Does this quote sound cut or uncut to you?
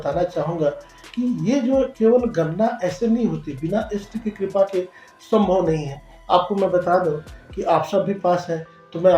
uncut